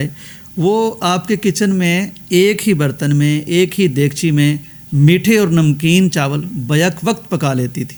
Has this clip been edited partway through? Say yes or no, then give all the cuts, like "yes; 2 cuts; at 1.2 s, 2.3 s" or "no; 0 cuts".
no; 0 cuts